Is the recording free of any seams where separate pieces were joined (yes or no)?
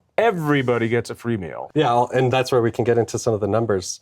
no